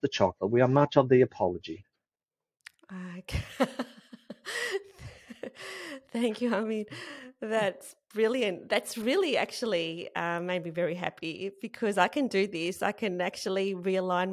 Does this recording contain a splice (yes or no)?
yes